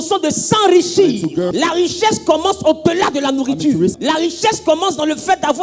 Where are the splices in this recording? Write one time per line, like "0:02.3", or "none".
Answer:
0:01.5
0:04.0

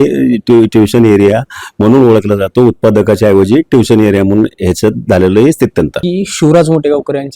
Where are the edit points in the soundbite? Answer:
0:06.0

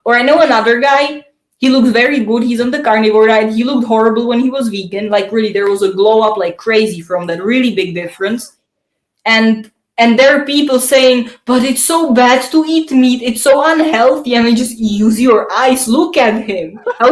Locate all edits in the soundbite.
none

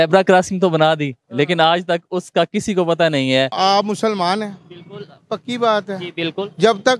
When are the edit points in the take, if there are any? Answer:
0:03.5

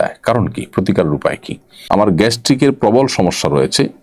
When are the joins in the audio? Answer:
0:01.8

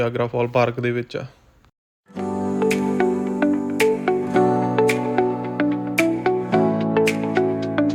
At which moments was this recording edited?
none

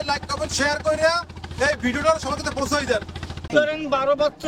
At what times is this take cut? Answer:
0:03.5

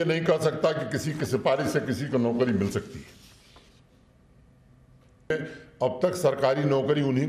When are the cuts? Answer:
0:05.3

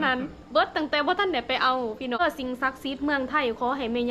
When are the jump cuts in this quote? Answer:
0:02.2

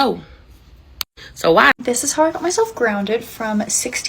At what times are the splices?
0:01.7

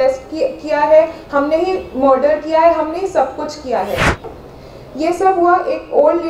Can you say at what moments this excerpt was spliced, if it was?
0:04.4

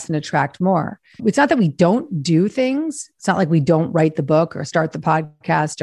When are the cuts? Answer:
0:01.2

